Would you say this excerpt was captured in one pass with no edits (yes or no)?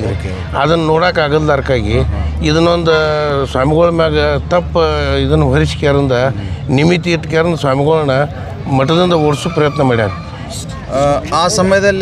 yes